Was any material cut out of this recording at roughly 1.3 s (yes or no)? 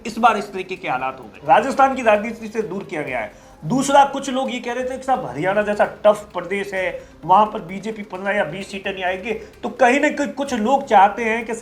yes